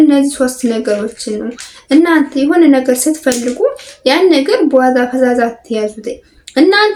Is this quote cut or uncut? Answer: uncut